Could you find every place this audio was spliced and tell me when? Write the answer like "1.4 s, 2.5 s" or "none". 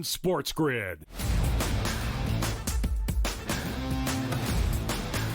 1.1 s, 2.1 s